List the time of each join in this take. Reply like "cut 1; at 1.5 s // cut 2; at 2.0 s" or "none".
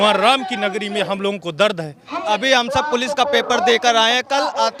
cut 1; at 2.2 s